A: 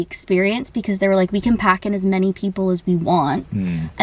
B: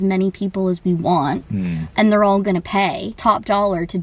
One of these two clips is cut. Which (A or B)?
B